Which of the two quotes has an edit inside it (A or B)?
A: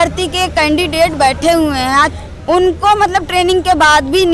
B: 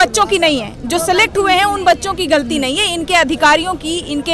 A